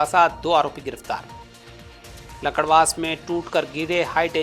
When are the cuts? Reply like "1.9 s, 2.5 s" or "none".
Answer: none